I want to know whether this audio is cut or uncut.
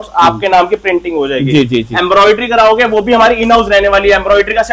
uncut